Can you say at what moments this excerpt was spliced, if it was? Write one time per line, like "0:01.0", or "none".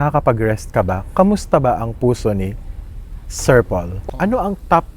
0:04.0

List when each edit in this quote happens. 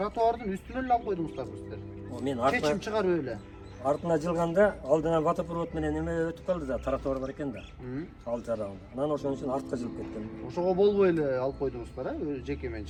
none

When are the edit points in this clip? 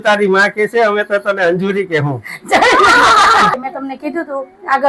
0:03.5

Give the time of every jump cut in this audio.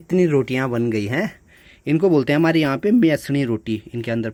none

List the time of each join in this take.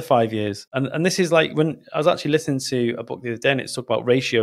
none

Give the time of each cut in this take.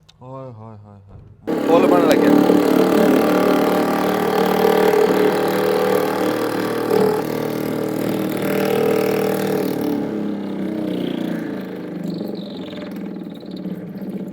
0:01.5
0:07.2

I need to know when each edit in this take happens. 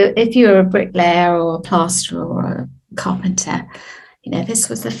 none

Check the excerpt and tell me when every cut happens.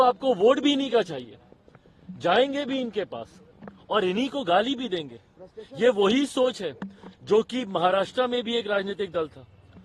none

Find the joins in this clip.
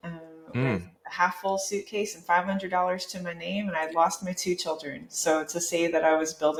none

